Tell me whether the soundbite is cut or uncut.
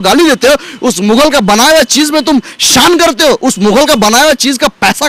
uncut